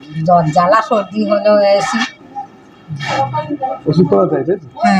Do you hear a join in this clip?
no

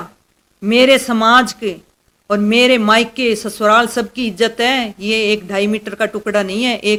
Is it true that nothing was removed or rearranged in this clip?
yes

